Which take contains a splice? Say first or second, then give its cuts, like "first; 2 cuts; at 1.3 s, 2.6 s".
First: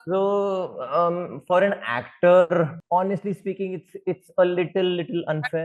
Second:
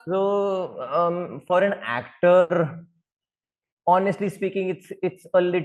first; 1 cut; at 2.8 s